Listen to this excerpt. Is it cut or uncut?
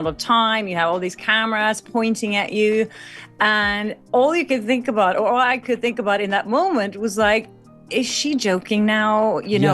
uncut